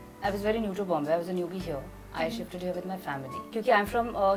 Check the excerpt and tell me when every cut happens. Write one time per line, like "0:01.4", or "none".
0:03.4